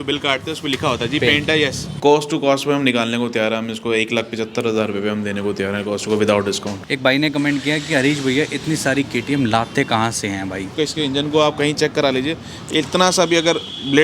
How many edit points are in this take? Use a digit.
3